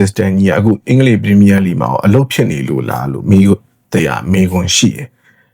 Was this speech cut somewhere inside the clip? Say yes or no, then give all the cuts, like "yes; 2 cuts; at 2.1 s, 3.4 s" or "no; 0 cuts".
no; 0 cuts